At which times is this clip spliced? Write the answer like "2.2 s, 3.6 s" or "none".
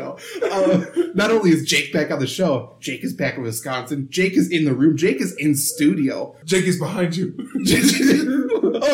6.4 s